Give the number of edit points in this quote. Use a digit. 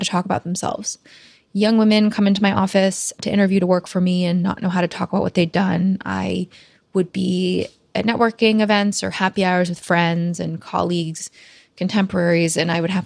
1